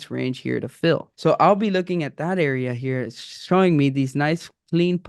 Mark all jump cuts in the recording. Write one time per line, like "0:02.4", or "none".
0:01.1